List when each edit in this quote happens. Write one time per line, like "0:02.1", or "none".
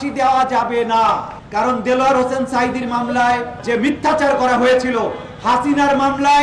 0:01.3
0:03.5

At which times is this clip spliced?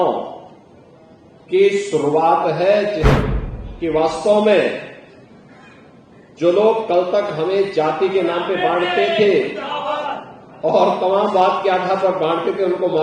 0:03.1

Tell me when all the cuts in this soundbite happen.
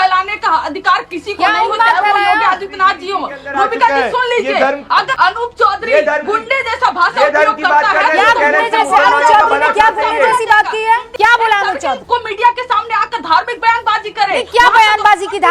0:05.1
0:11.1
0:12.0

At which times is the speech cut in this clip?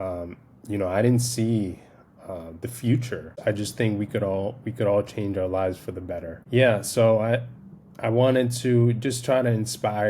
0:03.3
0:06.3

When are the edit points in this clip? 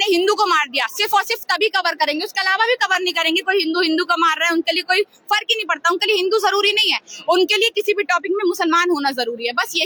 none

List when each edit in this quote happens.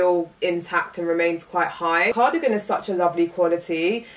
0:02.1

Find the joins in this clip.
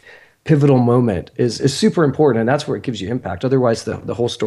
none

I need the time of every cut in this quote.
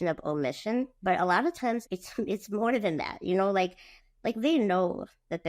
0:00.9
0:01.9
0:03.9

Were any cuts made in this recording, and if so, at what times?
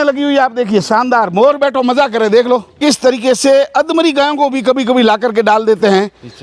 0:02.8

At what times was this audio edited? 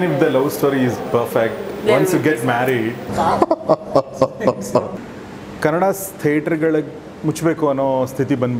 0:04.9

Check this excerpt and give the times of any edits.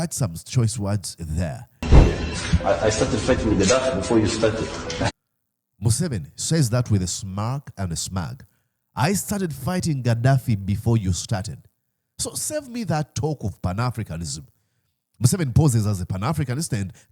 0:01.9

